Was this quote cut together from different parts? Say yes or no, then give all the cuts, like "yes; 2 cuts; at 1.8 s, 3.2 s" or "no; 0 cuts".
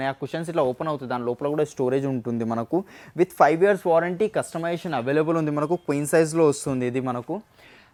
no; 0 cuts